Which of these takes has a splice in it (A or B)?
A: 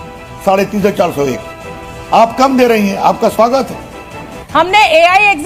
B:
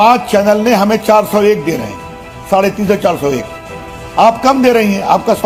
A